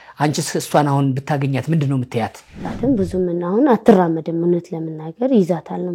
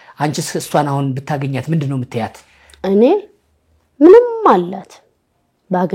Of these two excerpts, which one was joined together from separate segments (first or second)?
first